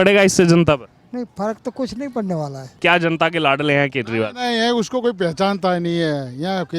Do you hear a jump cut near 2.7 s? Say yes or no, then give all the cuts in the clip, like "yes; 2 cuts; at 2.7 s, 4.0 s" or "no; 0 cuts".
yes; 1 cut; at 2.7 s